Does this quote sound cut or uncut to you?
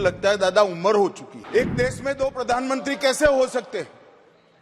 cut